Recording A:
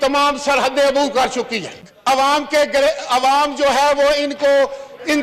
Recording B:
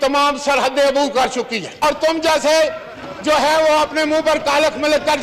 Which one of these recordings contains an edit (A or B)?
B